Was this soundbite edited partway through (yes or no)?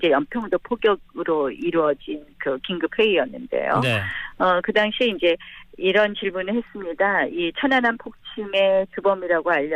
yes